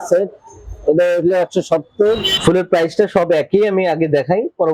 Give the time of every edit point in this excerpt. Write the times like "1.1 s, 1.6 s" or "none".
2.3 s